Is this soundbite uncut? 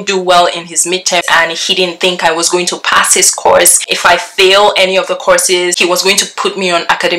no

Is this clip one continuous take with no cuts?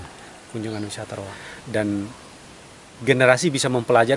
no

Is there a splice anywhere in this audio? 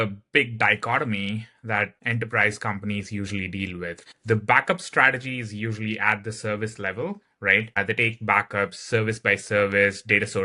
yes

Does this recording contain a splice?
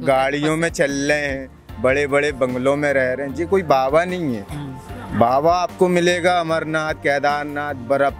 no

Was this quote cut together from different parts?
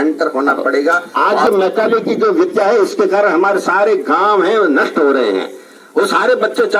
yes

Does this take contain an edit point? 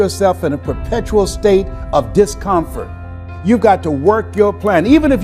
yes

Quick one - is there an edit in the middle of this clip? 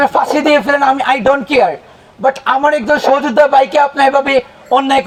no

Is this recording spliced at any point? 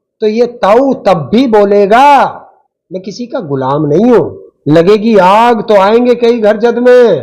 yes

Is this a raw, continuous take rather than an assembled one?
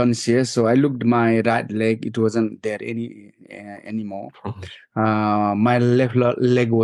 yes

